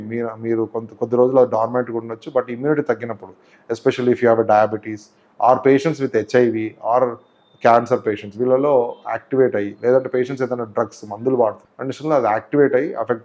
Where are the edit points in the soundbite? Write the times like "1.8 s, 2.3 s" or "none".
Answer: 11.7 s